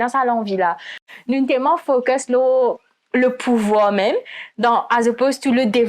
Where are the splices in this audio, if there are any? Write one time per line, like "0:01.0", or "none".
0:01.1